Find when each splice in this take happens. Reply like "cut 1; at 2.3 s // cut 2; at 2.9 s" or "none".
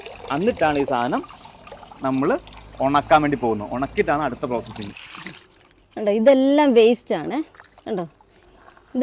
cut 1; at 5.0 s